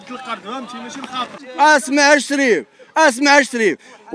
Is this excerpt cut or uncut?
cut